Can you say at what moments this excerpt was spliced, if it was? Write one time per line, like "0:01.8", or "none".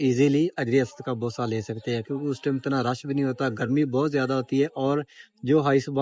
none